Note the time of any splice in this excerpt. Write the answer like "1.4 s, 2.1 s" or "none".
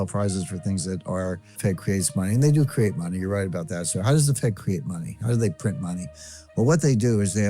1.6 s